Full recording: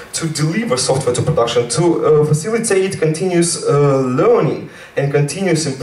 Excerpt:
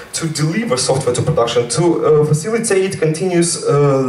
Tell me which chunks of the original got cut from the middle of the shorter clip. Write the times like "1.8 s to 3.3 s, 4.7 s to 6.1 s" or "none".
none